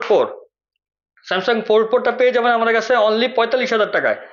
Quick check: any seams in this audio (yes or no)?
no